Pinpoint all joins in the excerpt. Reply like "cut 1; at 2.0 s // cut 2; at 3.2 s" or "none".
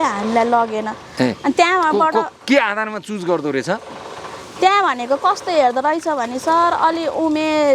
none